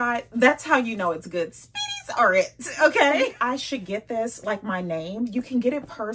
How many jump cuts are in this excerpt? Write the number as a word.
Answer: one